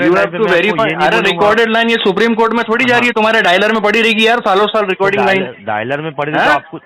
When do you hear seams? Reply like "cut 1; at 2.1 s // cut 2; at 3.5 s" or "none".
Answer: none